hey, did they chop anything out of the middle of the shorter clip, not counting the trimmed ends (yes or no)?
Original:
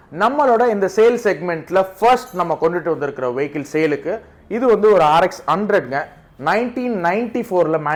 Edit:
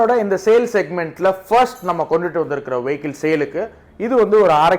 no